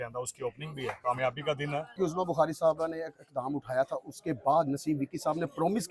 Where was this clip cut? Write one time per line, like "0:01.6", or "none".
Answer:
0:01.0
0:02.0